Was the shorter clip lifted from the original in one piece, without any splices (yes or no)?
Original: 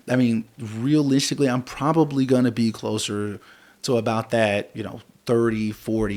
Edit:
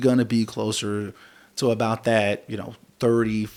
yes